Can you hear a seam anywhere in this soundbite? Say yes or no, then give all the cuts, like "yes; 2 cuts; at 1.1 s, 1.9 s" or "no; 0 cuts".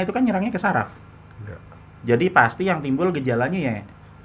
no; 0 cuts